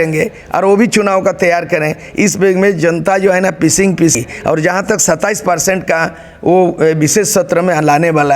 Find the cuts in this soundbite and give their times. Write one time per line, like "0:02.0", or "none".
0:04.1